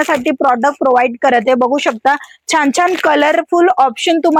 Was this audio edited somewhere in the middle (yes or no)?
no